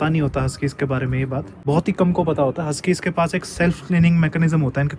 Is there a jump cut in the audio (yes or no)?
yes